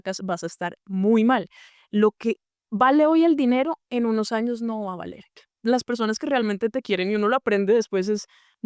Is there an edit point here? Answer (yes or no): yes